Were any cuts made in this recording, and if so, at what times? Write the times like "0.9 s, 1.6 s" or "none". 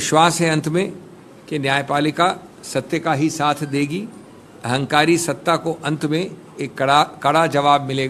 none